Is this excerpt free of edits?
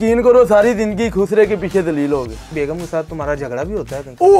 yes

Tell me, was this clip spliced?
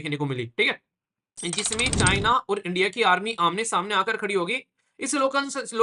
no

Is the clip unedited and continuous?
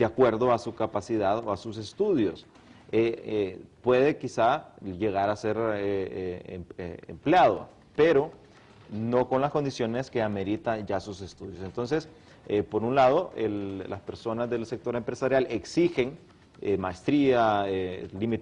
yes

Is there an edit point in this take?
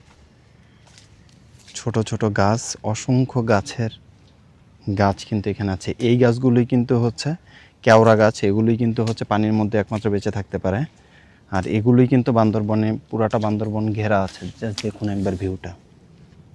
no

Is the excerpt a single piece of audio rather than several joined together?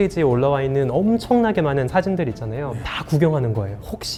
yes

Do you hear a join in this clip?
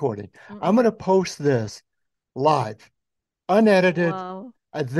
no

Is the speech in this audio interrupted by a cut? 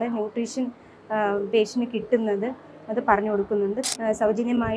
yes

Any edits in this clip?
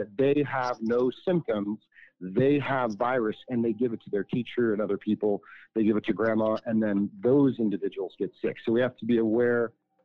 no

